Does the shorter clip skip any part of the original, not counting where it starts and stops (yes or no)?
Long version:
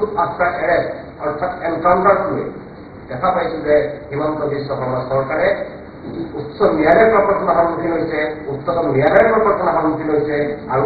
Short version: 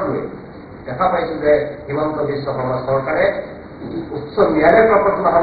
no